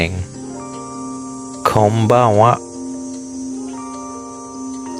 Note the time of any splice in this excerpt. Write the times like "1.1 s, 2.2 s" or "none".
none

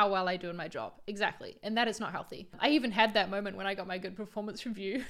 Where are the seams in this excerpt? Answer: none

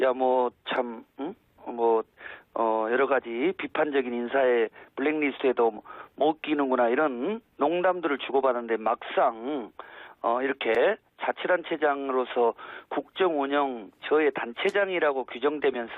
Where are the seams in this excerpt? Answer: 11.9 s

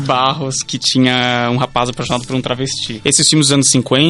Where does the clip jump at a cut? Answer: 2.9 s

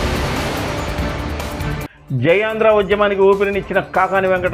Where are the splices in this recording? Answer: 1.9 s

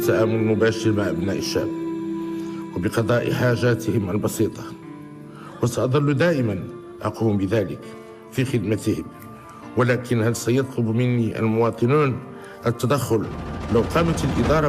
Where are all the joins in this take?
none

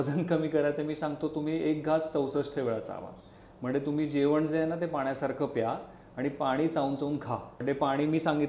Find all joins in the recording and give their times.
7.5 s

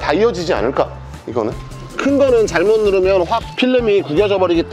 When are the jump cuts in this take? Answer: 1.9 s

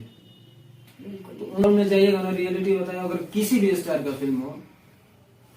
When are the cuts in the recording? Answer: 1.6 s

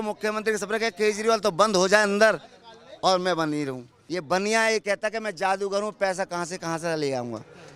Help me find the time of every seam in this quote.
4.0 s

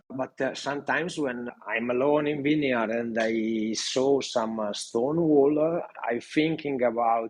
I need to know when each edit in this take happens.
6.0 s

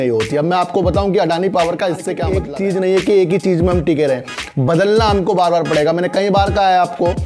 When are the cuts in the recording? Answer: 2.3 s

